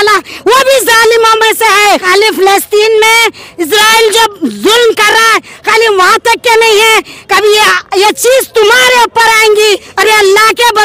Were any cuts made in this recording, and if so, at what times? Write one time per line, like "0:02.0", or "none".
0:02.0
0:09.9